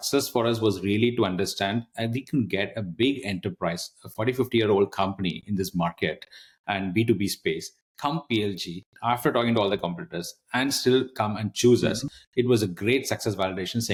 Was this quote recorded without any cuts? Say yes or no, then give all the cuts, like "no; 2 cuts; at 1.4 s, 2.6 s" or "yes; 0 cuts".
yes; 0 cuts